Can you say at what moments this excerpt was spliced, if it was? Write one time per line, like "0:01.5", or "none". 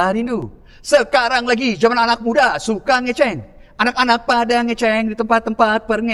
none